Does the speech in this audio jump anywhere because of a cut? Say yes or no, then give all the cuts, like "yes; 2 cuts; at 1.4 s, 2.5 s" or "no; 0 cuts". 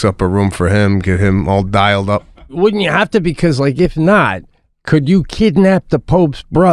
yes; 1 cut; at 2.5 s